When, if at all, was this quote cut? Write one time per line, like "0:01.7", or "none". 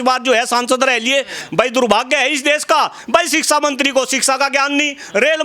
0:01.4